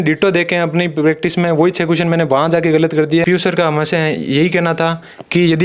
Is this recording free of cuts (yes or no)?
no